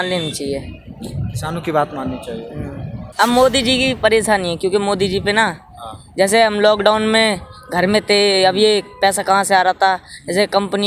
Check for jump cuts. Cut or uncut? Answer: cut